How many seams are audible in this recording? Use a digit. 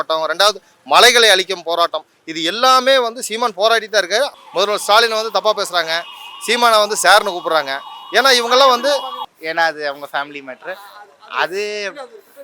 2